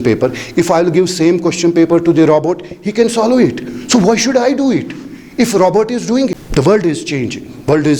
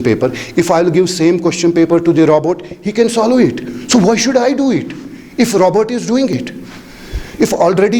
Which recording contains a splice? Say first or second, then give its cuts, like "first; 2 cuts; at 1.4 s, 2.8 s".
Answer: first; 1 cut; at 6.4 s